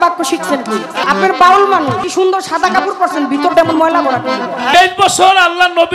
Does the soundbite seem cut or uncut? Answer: cut